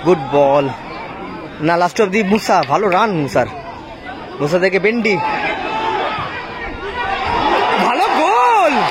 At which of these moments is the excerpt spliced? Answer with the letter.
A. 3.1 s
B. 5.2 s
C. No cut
C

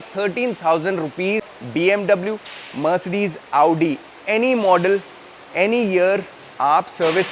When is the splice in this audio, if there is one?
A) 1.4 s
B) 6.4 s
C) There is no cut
A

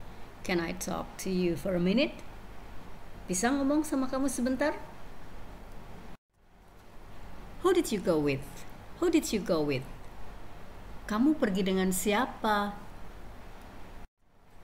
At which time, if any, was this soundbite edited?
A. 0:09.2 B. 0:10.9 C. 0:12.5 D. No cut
C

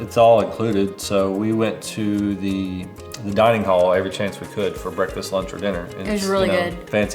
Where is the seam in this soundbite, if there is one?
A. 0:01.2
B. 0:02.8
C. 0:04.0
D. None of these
D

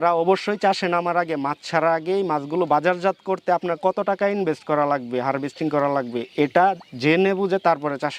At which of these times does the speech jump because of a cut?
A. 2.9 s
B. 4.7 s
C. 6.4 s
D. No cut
D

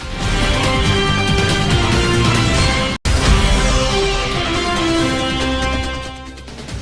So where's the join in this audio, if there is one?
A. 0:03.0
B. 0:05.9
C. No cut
A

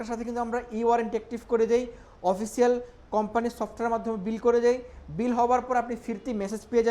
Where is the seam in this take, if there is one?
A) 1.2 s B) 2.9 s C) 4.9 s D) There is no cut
D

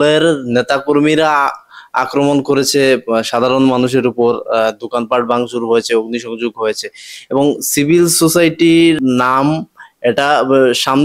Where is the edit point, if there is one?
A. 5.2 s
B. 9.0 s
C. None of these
B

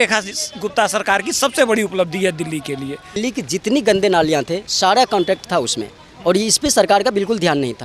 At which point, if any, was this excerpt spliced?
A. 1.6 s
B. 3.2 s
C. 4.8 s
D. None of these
B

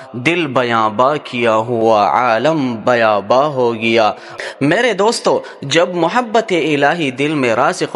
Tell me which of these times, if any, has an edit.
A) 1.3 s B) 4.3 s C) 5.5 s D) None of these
B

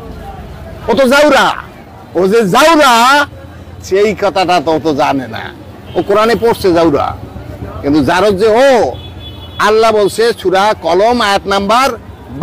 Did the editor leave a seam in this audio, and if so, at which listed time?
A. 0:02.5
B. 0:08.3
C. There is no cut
C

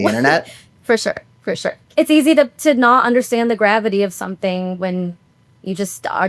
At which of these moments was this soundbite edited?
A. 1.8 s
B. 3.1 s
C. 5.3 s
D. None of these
A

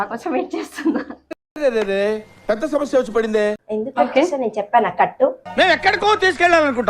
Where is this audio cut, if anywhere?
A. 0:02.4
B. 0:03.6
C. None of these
B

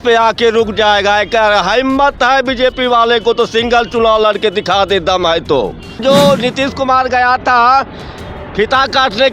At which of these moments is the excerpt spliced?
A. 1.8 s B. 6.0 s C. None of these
B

